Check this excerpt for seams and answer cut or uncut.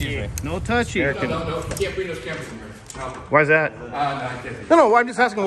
cut